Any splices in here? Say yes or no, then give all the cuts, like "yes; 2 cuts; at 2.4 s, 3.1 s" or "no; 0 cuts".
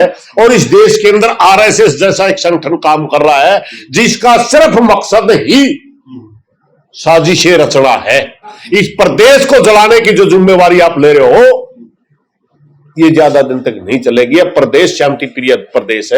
yes; 1 cut; at 8.6 s